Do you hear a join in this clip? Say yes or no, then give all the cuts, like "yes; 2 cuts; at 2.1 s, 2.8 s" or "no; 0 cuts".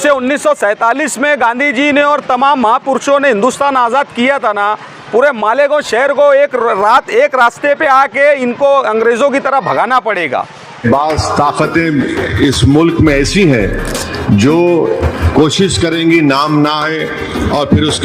yes; 1 cut; at 10.8 s